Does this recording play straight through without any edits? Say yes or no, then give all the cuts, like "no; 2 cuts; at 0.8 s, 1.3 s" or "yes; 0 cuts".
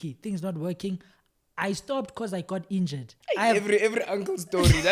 yes; 0 cuts